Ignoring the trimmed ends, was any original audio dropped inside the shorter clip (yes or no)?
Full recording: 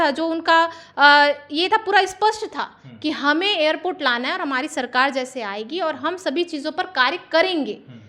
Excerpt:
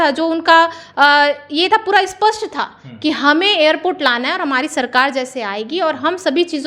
no